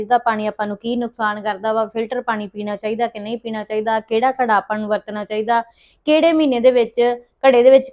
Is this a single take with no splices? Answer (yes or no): yes